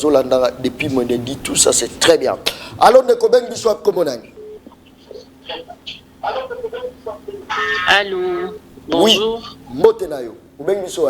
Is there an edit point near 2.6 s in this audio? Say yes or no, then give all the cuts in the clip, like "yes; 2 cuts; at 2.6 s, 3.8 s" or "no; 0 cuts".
no; 0 cuts